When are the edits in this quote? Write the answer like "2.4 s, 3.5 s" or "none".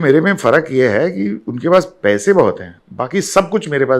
none